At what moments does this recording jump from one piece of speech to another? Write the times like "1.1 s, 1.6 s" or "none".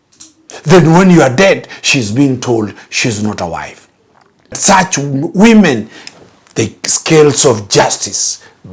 4.6 s

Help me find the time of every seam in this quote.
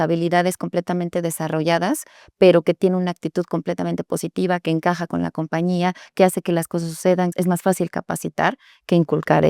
7.3 s

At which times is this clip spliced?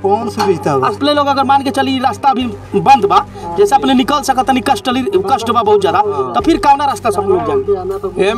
1.0 s

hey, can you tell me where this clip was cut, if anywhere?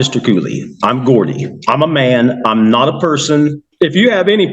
3.6 s

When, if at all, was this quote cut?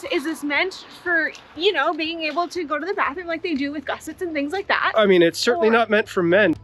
none

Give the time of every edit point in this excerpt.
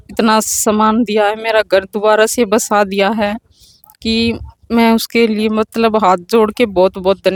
none

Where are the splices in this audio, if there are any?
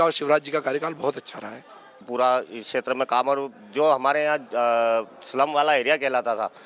2.1 s

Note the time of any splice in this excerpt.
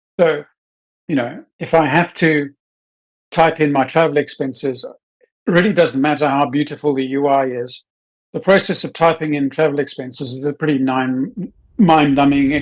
11.6 s

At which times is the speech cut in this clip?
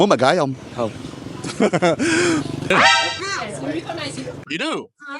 2.7 s

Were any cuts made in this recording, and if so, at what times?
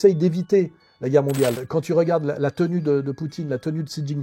1.6 s

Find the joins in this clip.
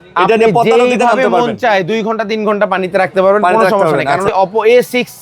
4.3 s

